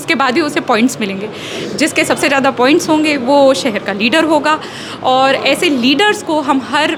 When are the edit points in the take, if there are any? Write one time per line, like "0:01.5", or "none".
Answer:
none